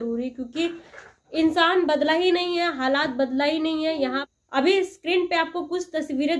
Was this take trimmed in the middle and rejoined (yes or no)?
yes